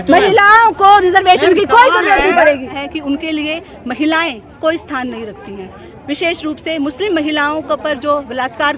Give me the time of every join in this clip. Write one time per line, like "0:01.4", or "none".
0:02.7